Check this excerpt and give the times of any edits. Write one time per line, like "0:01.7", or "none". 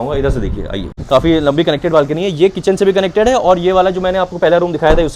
0:01.0